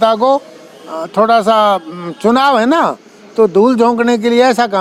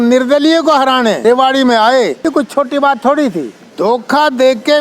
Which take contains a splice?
second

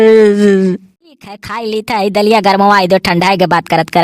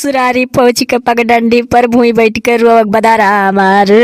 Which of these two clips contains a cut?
first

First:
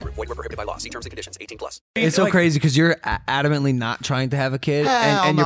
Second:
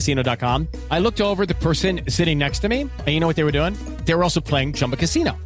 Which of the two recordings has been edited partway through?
first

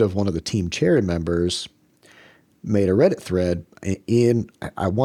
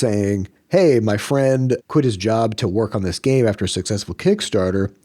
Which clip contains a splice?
second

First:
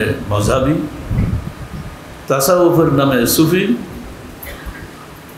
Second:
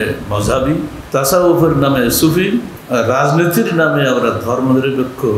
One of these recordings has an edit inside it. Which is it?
second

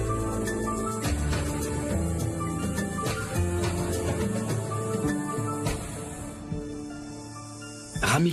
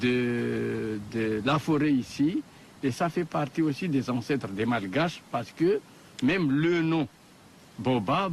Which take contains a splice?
second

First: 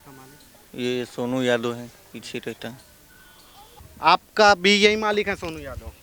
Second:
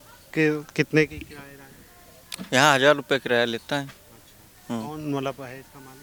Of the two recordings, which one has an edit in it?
first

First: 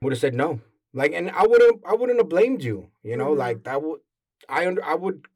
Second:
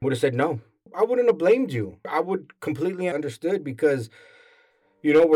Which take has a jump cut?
second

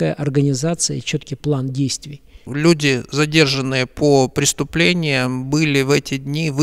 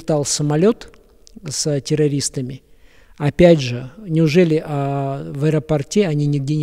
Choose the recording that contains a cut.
first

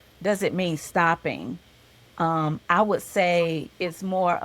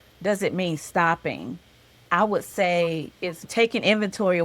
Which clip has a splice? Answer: second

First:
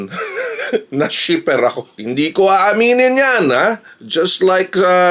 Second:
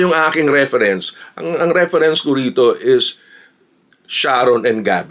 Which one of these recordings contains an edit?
first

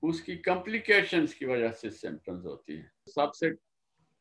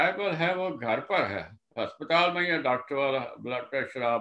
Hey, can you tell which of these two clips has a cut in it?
first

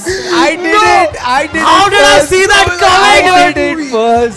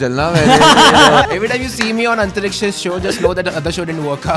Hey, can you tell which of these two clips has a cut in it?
second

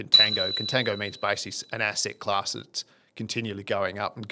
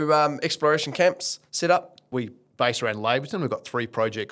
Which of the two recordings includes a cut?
second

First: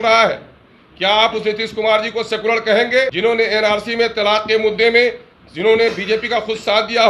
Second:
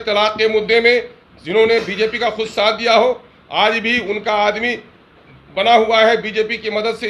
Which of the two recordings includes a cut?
first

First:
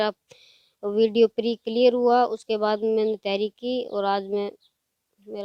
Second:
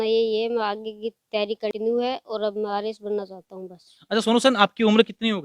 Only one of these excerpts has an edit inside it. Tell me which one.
second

